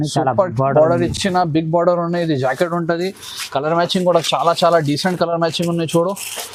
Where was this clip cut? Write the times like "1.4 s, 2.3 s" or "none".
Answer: none

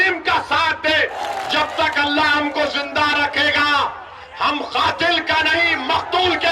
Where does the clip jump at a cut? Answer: 1.2 s

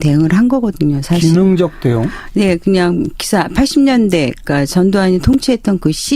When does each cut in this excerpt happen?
3.6 s

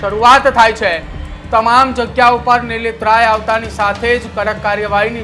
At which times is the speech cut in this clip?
1.3 s

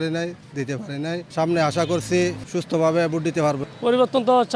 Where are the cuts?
1.3 s, 2.4 s, 3.6 s

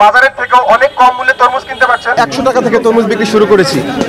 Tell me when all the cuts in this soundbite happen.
2.1 s

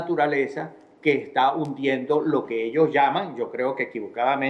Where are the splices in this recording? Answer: 2.2 s

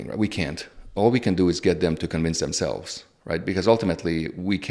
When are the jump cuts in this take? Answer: none

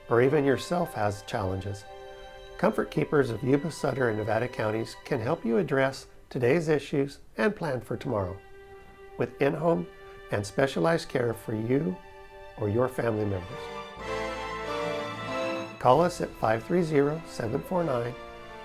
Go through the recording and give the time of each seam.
3.3 s

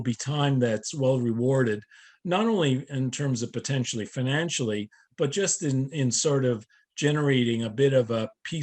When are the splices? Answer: none

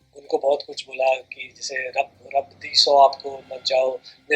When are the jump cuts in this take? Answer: none

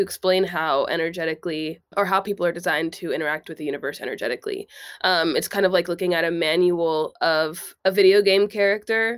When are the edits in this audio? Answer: 1.9 s, 7.6 s

